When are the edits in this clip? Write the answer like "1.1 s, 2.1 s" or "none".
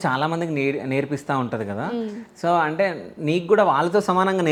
none